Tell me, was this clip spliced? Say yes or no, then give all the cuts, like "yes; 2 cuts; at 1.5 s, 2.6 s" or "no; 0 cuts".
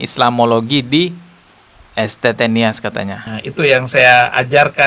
no; 0 cuts